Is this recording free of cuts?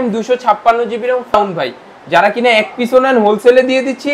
no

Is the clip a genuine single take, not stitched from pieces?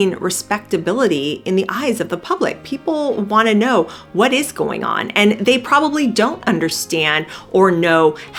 yes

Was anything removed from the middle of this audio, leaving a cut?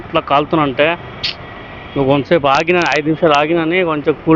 no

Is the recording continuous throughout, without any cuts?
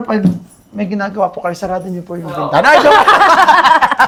yes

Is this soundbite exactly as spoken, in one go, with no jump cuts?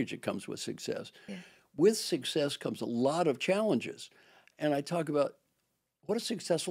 yes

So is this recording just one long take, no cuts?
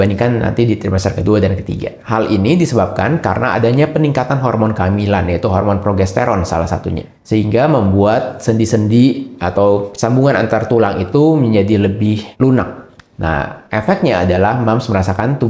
yes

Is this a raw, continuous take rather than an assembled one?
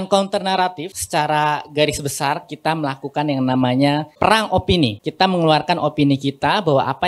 no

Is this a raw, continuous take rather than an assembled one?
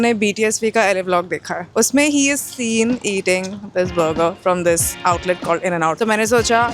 no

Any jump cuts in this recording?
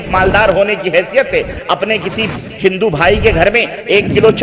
no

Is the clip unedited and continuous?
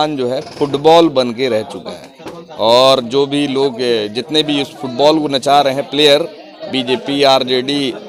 yes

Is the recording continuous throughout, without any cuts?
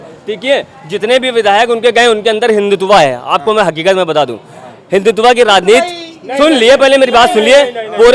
yes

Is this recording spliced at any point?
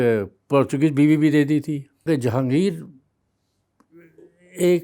yes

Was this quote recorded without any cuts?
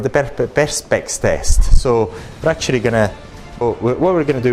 yes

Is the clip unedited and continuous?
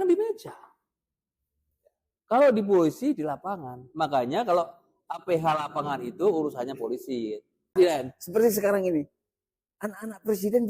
no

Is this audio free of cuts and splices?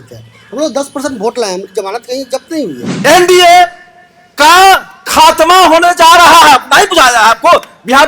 no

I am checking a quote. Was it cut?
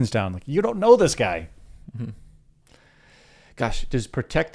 no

